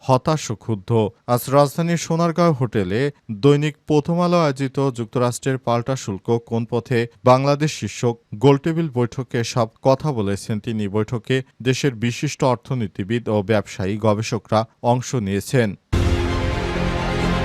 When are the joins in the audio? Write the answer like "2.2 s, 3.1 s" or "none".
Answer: 16.0 s